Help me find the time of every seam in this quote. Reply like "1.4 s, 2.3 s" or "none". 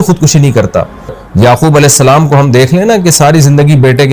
1.2 s